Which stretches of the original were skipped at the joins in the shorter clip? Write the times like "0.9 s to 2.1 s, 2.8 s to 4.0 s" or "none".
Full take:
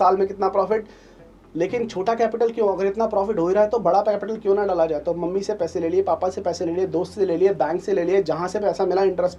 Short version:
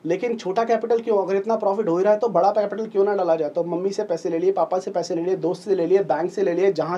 none